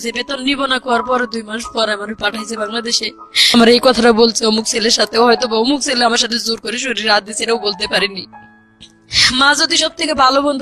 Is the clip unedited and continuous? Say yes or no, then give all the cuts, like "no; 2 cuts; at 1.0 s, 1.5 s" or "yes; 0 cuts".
no; 1 cut; at 3.5 s